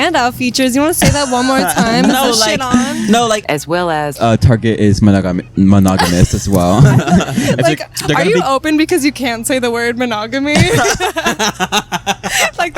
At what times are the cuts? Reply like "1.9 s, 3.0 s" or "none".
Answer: 3.8 s